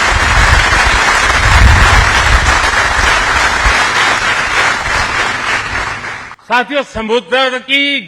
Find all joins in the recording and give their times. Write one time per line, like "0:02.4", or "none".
0:06.3